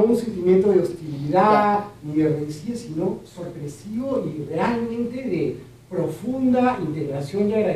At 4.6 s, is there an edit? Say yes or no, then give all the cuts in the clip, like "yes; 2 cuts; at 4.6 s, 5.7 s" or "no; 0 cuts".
no; 1 cut; at 6.6 s